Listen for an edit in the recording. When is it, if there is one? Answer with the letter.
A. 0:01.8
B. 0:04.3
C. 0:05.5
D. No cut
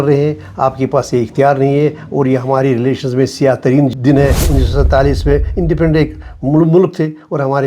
B